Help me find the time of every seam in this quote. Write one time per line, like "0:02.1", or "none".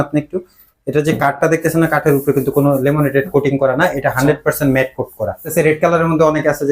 0:05.5